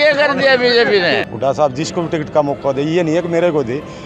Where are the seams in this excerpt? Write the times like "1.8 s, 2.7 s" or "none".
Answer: 1.3 s